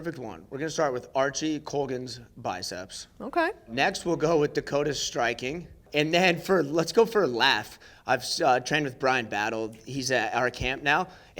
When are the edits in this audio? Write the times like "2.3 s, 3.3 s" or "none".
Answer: 3.7 s, 5.8 s